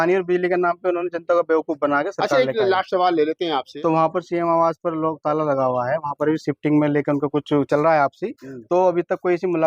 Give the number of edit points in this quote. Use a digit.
1